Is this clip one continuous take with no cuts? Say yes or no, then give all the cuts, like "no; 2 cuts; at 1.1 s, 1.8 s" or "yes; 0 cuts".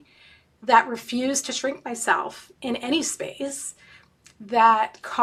yes; 0 cuts